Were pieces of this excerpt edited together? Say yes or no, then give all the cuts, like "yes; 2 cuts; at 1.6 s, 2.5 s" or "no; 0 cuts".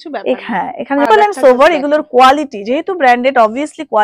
yes; 1 cut; at 1.1 s